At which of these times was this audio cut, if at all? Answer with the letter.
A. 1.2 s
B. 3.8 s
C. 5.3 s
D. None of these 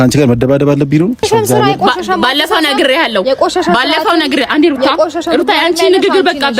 A